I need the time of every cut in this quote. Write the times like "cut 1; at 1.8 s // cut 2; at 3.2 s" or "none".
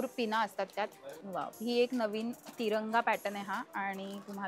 cut 1; at 1.1 s